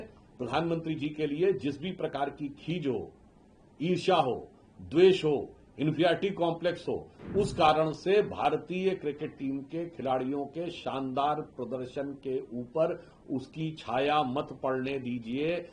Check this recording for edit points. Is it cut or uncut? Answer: uncut